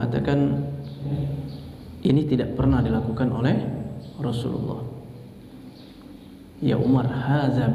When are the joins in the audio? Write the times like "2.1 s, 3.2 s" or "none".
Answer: 1.1 s